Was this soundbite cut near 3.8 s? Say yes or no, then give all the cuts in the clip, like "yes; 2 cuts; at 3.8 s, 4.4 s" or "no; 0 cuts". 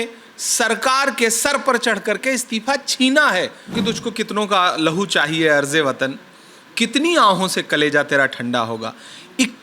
yes; 1 cut; at 3.8 s